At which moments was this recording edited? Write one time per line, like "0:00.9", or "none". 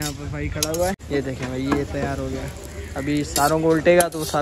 0:01.0